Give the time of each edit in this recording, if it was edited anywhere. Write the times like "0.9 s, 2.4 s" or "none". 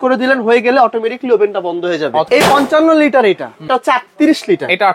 2.3 s, 3.7 s